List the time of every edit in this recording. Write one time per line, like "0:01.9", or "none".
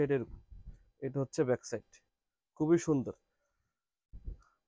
none

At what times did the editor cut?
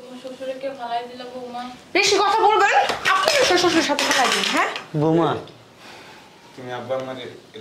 none

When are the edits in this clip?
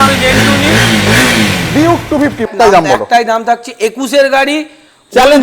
0:02.5

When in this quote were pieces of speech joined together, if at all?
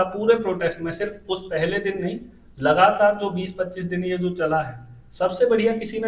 none

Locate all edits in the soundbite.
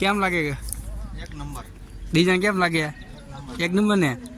none

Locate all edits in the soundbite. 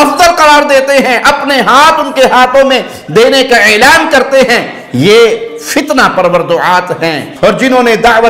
0:07.3

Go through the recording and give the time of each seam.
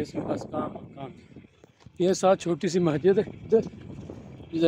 none

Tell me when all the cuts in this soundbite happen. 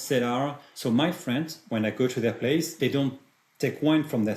0:01.6
0:02.7

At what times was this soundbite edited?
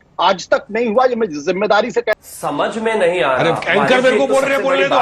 0:02.2

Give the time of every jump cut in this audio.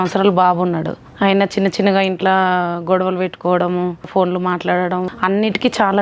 0:01.0
0:04.1
0:05.1

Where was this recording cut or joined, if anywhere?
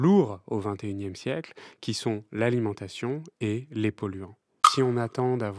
0:04.7

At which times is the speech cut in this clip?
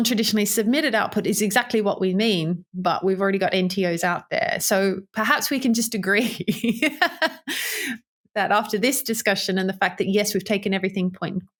none

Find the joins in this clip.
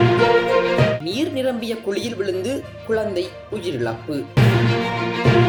none

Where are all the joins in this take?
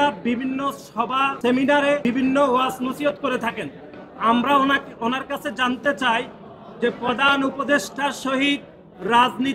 0:01.3
0:02.0

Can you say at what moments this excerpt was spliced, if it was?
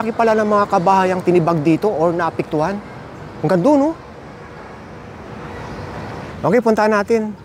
0:06.3

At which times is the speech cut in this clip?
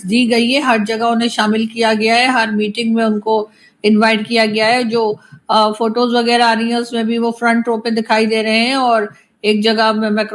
none

